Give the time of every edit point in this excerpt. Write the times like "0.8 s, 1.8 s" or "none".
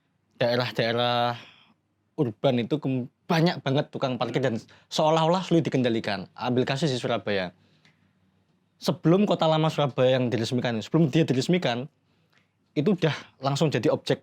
none